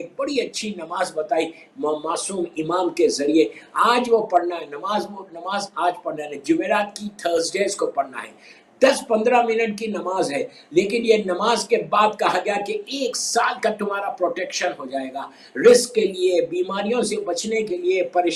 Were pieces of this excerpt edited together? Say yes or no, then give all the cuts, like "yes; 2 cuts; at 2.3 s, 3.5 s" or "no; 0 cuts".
no; 0 cuts